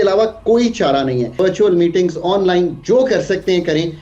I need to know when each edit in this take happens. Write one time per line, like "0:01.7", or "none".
0:01.4